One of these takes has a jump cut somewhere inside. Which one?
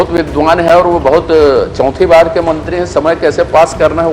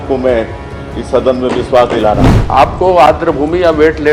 second; 1 cut; at 2.3 s

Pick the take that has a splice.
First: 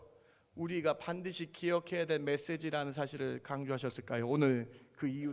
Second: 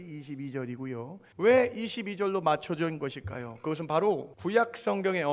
second; 2 cuts; at 1.2 s, 4.3 s

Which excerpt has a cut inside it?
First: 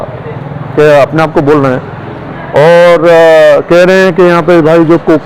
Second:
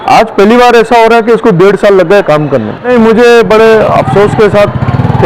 second; 1 cut; at 2.9 s

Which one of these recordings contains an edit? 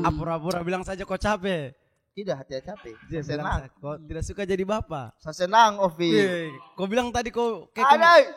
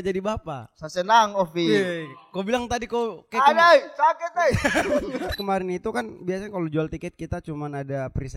second; 1 cut; at 5.3 s

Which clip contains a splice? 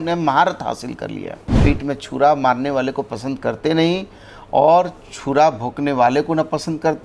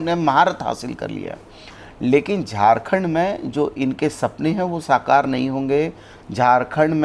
first; 1 cut; at 1.6 s

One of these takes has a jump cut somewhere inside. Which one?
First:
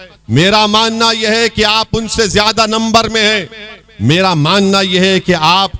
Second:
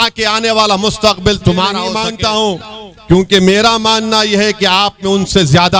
second; 1 cut; at 2.0 s

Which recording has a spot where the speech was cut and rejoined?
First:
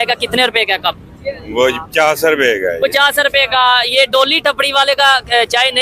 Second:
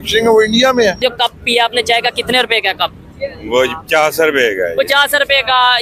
second; 1 cut; at 1.0 s

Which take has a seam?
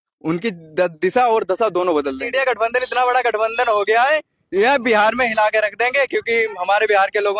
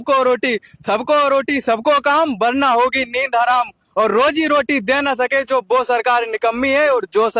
first; 1 cut; at 2.2 s

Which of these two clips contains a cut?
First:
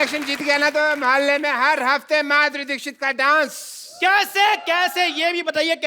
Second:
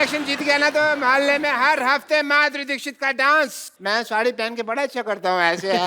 second; 1 cut; at 3.7 s

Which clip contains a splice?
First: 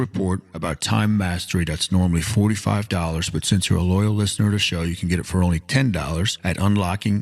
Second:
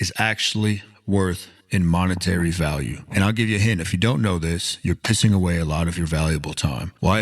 second; 1 cut; at 1.5 s

